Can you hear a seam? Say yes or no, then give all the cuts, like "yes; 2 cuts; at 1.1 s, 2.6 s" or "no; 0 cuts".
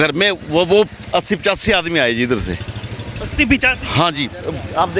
no; 0 cuts